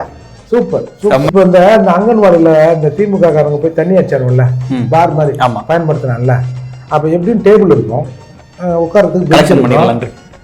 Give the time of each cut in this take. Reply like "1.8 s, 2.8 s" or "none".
1.2 s

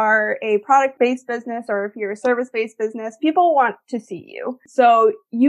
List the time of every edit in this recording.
0.9 s, 4.6 s

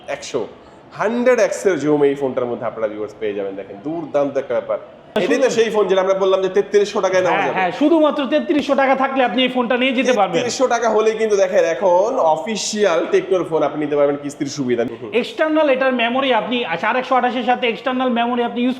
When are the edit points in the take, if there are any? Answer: 5.2 s, 14.9 s

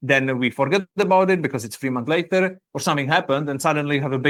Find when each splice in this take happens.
none

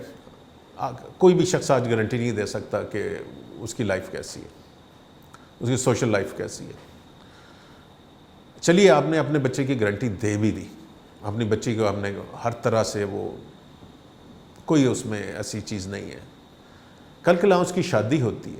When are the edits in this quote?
none

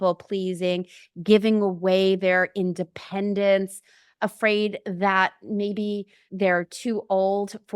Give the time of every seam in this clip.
6.3 s

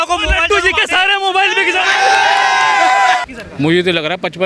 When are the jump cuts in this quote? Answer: 3.2 s

